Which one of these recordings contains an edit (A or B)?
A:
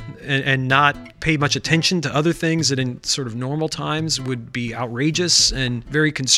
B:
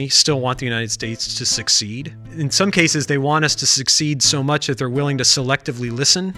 B